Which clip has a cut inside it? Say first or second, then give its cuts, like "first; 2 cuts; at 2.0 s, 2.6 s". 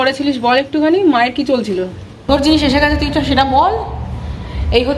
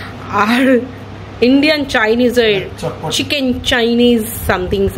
first; 1 cut; at 2.1 s